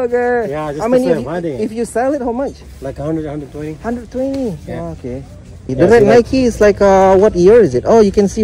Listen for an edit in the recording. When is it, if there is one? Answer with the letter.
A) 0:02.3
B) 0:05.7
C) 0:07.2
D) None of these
B